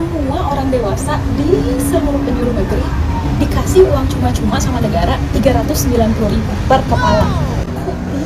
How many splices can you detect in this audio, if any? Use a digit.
0